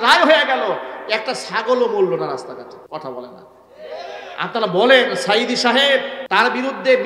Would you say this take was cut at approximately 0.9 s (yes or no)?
no